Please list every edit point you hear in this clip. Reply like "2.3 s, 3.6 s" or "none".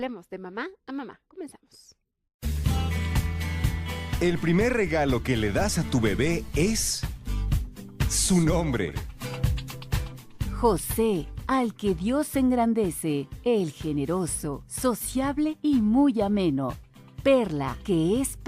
5.6 s